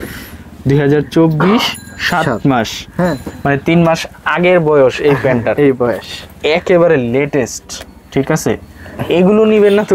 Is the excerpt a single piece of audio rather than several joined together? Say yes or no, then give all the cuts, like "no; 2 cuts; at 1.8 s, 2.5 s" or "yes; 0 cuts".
yes; 0 cuts